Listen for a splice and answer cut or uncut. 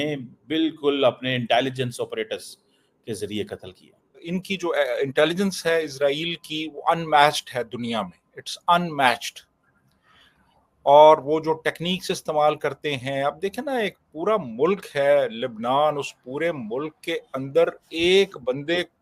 cut